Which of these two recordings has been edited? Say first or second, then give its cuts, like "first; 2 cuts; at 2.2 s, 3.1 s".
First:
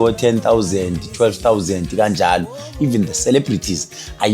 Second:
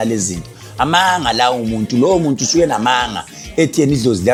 first; 1 cut; at 2.6 s